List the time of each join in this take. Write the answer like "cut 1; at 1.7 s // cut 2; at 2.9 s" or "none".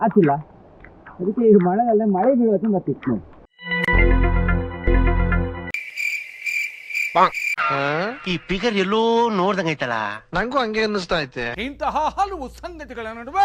cut 1; at 11.5 s